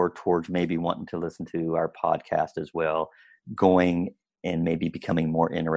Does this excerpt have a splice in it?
no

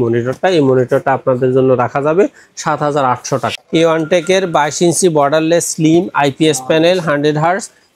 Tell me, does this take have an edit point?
yes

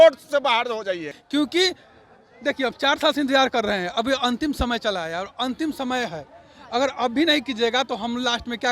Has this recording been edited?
yes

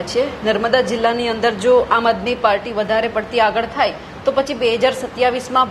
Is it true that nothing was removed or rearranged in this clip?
yes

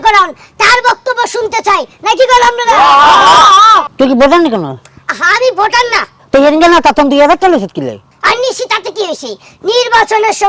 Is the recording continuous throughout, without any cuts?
no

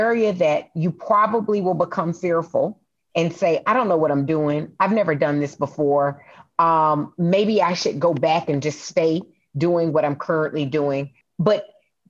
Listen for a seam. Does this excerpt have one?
yes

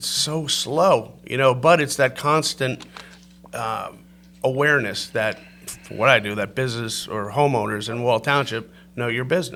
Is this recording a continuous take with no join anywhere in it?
yes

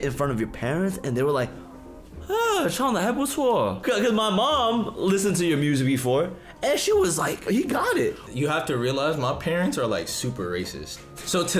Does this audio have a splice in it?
yes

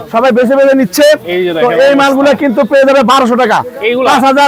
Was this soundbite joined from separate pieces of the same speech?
no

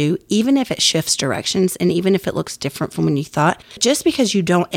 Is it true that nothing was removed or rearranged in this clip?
no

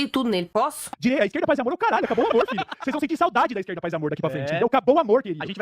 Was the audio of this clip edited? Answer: yes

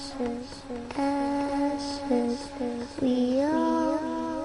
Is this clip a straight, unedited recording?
yes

